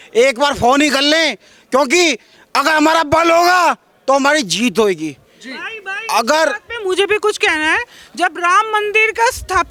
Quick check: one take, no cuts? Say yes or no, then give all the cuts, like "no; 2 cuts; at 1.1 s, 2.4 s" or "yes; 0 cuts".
yes; 0 cuts